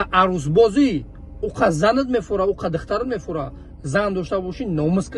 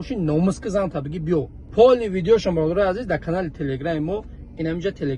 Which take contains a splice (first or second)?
second